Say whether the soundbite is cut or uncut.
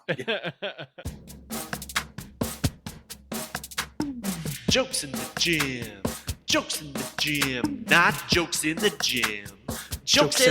cut